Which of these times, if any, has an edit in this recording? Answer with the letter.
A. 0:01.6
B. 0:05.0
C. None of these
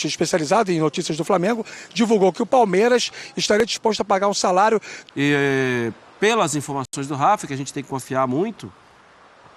B